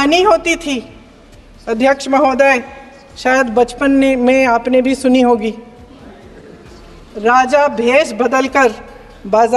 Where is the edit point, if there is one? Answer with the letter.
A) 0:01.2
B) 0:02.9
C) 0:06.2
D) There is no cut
D